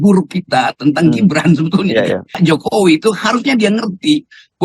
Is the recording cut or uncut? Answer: cut